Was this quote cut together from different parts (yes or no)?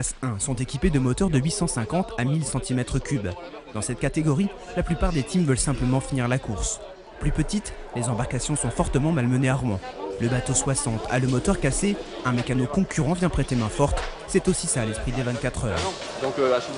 no